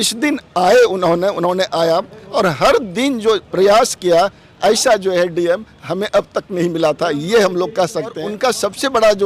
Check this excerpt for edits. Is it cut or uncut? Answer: cut